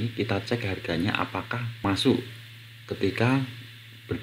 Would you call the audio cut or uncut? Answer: cut